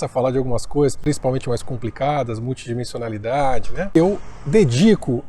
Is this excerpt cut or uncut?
cut